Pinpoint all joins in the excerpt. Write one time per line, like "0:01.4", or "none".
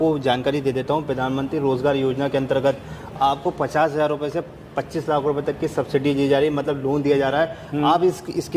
none

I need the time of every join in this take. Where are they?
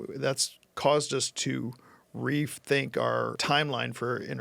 0:03.4

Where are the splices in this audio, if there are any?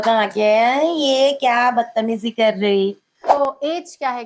0:03.3

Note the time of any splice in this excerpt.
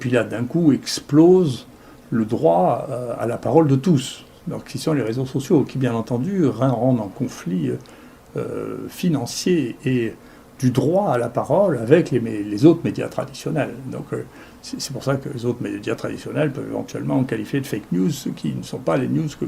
none

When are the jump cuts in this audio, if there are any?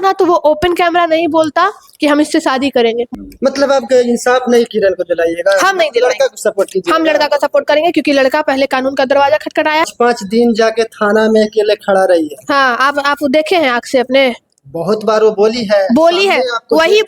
0:03.1
0:09.8

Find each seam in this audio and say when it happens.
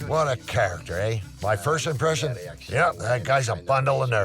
0:01.3

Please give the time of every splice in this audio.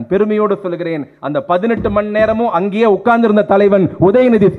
none

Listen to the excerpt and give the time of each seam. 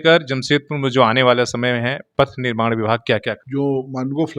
0:03.4

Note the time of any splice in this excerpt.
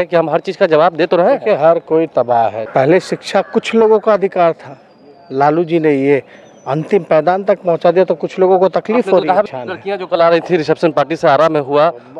0:02.6
0:09.5

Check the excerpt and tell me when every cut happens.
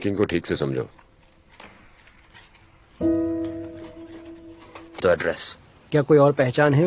0:05.0

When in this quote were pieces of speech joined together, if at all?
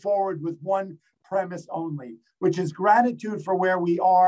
none

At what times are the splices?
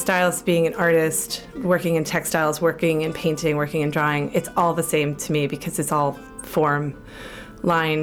none

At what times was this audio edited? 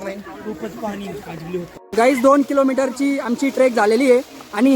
0:01.8

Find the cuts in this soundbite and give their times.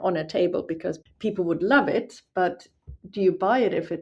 0:01.0

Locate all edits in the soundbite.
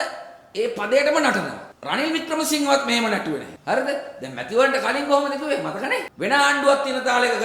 0:06.1

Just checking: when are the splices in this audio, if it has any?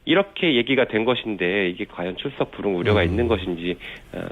0:01.6

